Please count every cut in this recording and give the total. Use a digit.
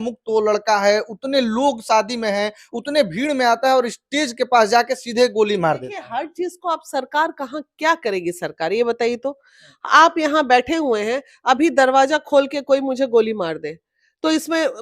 0